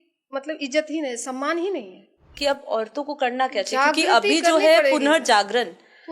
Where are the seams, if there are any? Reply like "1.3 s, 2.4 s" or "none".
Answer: 2.3 s